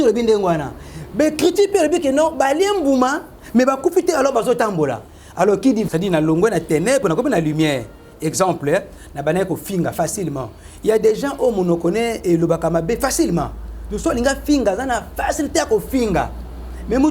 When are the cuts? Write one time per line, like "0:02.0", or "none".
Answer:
0:05.9